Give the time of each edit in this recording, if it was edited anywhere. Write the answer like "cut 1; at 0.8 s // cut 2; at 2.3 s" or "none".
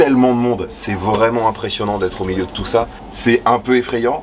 cut 1; at 3.0 s